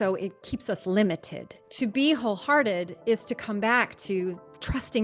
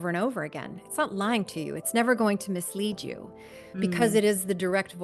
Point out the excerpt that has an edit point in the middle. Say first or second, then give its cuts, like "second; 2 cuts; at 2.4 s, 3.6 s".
first; 1 cut; at 1.6 s